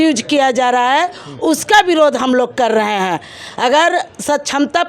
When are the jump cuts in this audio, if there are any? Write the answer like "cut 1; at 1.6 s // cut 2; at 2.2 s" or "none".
none

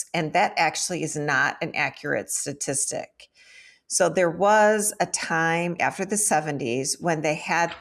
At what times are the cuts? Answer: cut 1; at 5.8 s

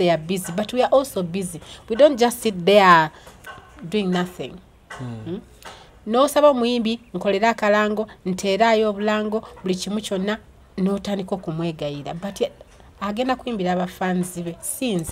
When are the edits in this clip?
none

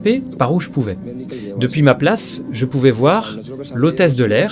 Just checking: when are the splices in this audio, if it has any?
none

